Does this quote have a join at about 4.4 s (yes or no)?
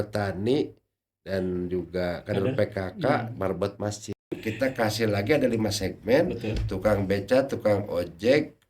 yes